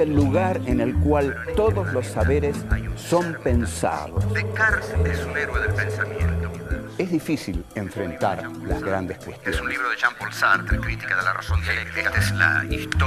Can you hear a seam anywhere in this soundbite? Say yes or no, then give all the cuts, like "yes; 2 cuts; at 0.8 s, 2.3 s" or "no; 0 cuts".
yes; 1 cut; at 5.9 s